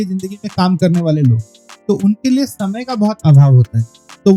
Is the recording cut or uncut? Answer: uncut